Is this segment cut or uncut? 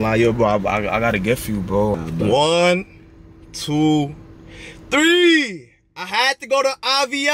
cut